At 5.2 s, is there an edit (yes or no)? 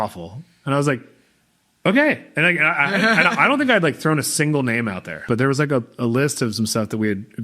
yes